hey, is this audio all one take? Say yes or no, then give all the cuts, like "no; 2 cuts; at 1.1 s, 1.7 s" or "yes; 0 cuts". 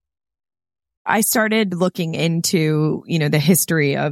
no; 1 cut; at 1.1 s